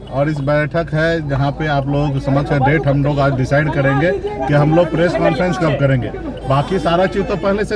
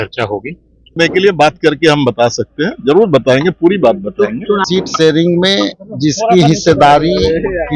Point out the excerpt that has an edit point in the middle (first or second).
second